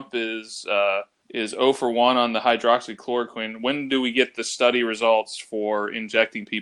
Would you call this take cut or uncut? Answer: cut